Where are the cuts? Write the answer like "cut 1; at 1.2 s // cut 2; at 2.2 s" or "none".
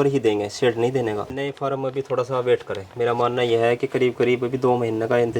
cut 1; at 1.4 s